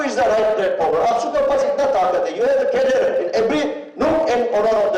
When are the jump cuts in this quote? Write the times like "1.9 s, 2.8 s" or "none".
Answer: none